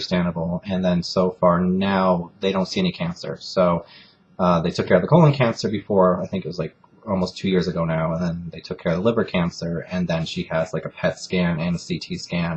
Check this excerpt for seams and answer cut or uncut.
cut